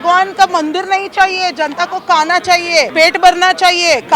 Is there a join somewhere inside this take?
yes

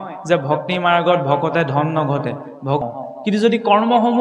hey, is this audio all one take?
no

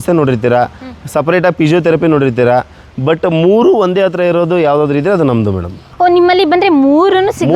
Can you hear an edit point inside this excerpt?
no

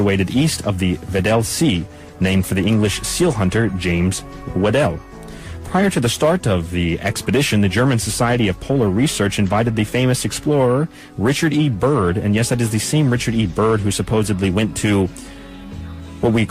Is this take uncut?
no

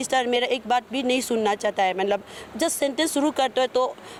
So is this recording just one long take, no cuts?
yes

